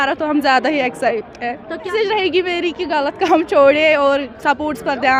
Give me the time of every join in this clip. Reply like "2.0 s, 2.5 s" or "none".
1.9 s